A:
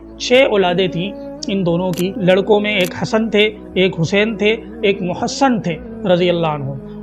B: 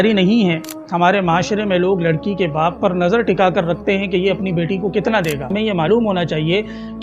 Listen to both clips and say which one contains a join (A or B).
B